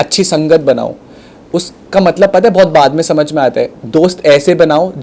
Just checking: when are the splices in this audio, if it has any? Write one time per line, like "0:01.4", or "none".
0:03.8